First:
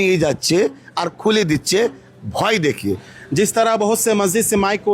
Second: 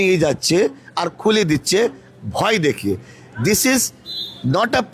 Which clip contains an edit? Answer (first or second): first